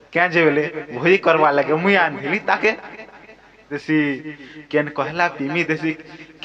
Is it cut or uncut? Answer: cut